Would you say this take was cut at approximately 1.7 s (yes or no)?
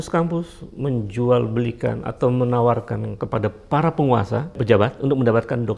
no